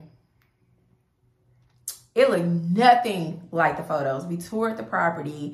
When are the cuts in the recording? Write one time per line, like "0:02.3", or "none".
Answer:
none